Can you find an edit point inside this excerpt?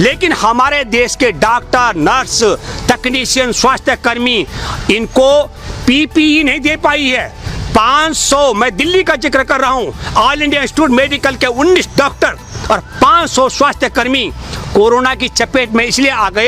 no; 0 cuts

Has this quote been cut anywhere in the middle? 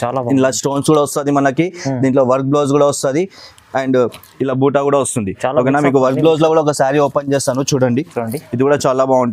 no; 0 cuts

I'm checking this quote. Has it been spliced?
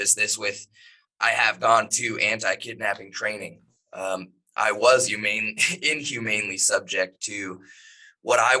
no; 0 cuts

